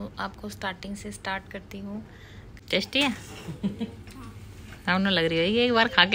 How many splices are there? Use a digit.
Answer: 1